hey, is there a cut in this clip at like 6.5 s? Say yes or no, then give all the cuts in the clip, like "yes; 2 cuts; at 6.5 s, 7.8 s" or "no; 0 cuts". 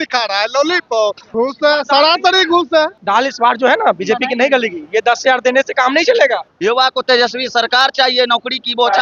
yes; 3 cuts; at 1.2 s, 3.0 s, 6.5 s